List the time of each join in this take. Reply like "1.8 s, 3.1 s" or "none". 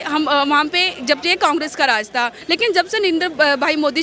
2.4 s